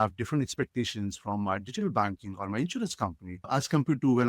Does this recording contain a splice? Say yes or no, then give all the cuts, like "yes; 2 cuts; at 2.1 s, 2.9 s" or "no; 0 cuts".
yes; 1 cut; at 3.4 s